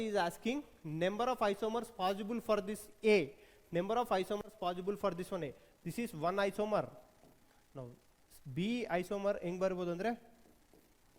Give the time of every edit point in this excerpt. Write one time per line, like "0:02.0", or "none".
none